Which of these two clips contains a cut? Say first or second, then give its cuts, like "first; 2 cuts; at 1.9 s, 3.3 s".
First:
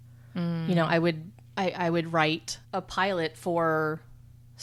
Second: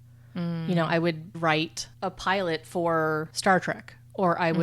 second; 2 cuts; at 1.4 s, 3.3 s